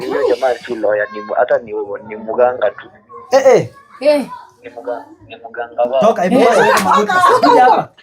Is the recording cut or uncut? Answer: cut